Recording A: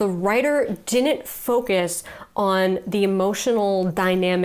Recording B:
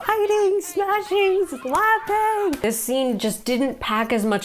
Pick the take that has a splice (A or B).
B